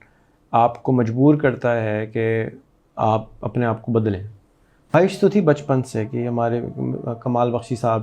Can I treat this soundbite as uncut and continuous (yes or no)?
no